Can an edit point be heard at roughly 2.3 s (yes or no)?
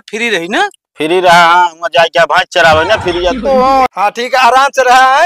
no